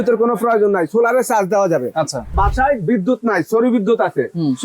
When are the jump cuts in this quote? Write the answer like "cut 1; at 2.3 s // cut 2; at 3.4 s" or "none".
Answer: cut 1; at 2.5 s